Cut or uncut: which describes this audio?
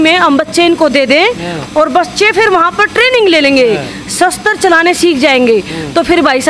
uncut